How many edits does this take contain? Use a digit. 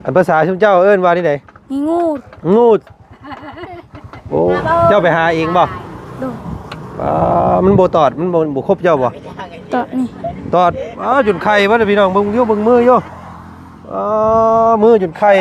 1